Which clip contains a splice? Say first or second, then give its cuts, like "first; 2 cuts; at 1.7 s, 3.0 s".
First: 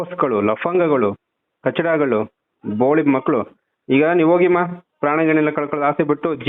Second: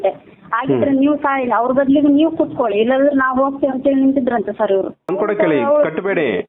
second; 1 cut; at 5.1 s